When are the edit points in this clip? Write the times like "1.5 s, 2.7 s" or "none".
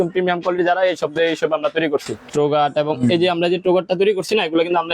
2.2 s